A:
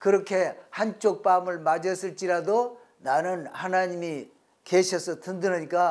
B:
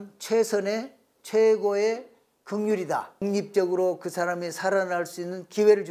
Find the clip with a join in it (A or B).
B